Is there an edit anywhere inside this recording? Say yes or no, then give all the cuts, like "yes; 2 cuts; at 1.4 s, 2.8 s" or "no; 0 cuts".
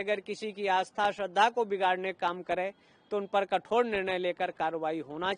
no; 0 cuts